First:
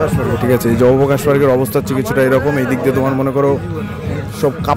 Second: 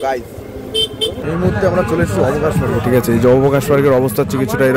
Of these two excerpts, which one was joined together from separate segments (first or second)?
second